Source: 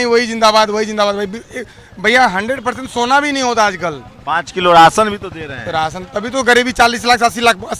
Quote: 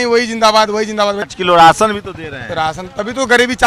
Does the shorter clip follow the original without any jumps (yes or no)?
no